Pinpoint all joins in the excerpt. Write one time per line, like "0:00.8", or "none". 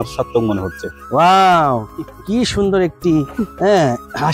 0:00.9